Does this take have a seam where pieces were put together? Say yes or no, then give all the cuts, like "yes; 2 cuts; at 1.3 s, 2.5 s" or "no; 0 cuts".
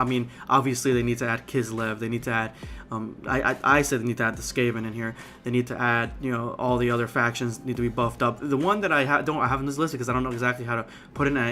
yes; 1 cut; at 10.6 s